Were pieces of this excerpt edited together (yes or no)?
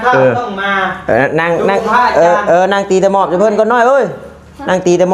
no